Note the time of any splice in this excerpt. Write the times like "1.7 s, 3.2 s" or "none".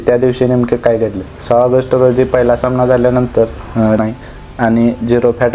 4.0 s